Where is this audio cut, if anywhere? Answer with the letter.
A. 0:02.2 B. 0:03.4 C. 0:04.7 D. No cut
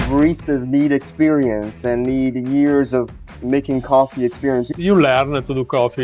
C